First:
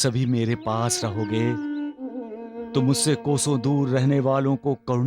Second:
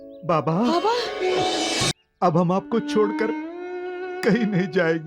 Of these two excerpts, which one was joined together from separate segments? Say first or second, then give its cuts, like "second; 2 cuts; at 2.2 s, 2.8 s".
second; 1 cut; at 2.0 s